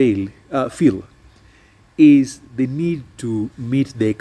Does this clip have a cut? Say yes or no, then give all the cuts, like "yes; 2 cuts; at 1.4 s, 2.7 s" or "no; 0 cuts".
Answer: no; 0 cuts